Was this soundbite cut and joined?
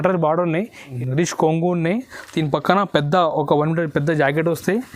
yes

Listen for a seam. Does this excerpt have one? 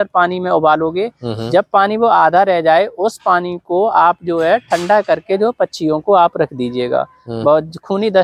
no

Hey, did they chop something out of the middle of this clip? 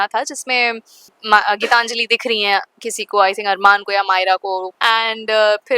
yes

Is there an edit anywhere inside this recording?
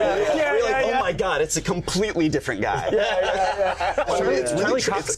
yes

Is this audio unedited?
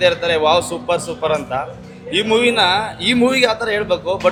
yes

